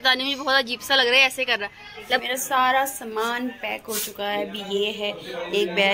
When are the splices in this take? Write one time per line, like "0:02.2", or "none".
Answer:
0:02.2